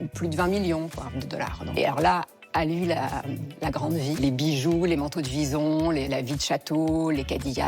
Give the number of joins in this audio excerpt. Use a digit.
1